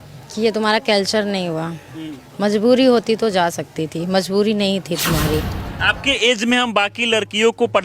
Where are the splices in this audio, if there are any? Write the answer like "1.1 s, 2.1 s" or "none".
5.6 s